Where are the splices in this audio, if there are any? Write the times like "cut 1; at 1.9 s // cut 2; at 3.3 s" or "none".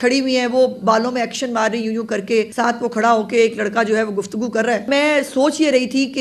cut 1; at 2.5 s // cut 2; at 4.9 s